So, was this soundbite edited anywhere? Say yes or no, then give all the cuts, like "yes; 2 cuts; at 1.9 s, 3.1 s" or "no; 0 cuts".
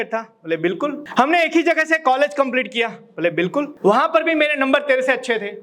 yes; 2 cuts; at 1.0 s, 3.7 s